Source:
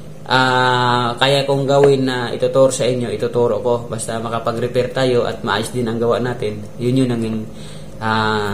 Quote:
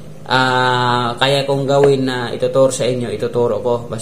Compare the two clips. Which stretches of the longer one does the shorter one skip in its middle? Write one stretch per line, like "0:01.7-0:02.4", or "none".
none